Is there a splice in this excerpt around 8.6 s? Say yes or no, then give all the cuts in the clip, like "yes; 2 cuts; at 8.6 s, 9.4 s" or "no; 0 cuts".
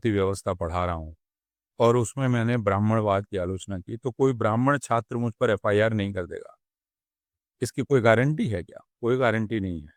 no; 0 cuts